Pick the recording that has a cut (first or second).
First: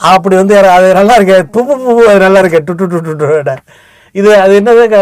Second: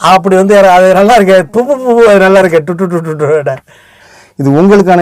second